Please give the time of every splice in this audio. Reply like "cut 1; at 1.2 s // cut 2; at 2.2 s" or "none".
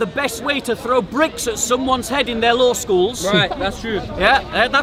none